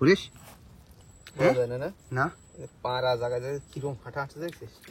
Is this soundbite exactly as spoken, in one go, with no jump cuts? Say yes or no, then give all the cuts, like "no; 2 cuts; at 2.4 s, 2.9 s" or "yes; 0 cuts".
yes; 0 cuts